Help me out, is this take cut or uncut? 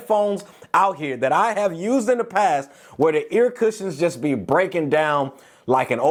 uncut